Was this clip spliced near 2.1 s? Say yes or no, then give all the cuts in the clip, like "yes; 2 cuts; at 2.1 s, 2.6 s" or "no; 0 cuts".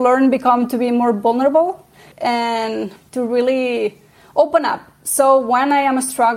yes; 2 cuts; at 2.1 s, 3.0 s